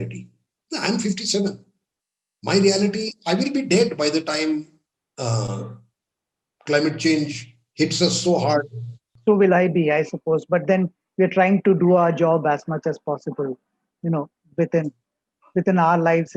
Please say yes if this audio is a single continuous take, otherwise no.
no